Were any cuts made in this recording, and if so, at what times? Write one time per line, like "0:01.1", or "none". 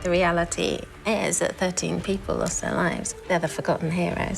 0:03.0